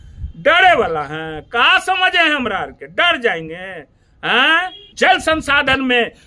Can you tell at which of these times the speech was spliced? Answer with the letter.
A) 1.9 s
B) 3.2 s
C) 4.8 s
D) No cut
C